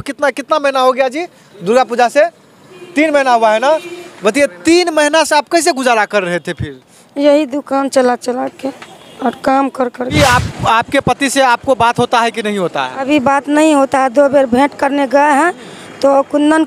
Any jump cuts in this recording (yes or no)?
yes